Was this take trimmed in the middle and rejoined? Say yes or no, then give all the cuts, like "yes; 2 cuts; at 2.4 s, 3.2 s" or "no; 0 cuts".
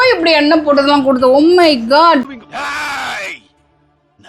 no; 0 cuts